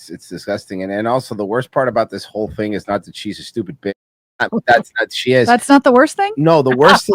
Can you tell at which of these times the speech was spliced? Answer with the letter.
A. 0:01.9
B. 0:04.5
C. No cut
B